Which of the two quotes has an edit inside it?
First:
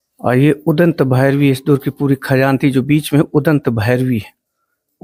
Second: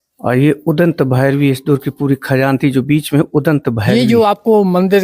second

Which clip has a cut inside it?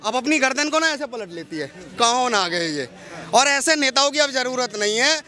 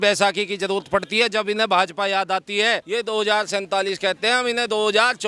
second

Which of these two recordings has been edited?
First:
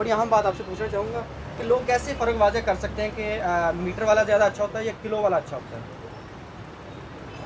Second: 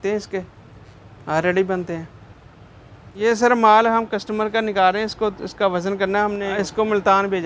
second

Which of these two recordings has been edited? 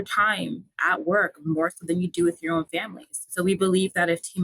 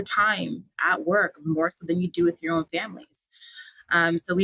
first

